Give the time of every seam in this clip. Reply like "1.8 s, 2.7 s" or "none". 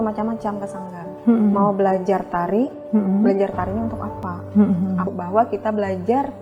5.1 s